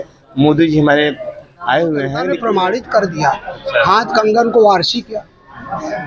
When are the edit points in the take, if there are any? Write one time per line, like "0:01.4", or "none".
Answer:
0:02.3